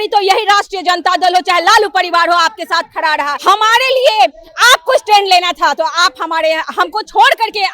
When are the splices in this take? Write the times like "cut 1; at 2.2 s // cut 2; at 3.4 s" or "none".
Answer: cut 1; at 3.3 s